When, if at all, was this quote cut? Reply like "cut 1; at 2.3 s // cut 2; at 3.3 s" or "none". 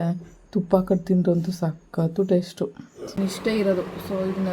cut 1; at 3.2 s